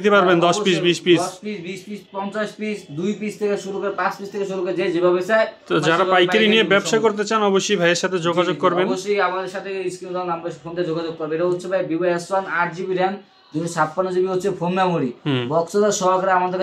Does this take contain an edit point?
no; 0 cuts

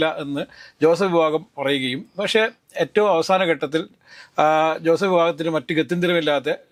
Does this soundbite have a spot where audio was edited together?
no; 0 cuts

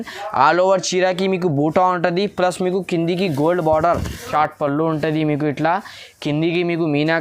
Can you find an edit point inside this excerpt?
yes; 1 cut; at 4.3 s

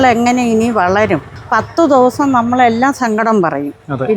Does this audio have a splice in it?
yes; 1 cut; at 1.4 s

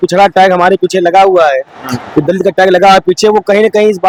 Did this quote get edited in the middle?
no; 0 cuts

